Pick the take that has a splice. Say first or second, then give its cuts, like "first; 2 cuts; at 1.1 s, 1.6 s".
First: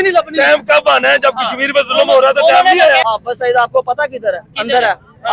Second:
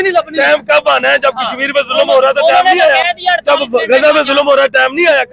first; 1 cut; at 3.1 s